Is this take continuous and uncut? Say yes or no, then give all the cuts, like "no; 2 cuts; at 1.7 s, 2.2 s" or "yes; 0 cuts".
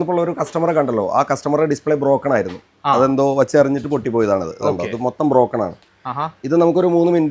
yes; 0 cuts